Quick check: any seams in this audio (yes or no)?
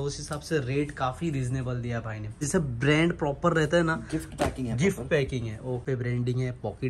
yes